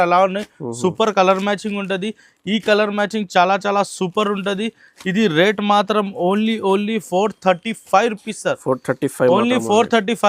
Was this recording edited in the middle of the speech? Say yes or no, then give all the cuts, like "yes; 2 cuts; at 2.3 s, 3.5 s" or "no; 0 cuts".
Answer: no; 0 cuts